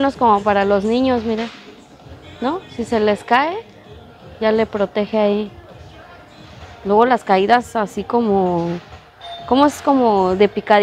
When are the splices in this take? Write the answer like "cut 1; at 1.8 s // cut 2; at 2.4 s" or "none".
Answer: none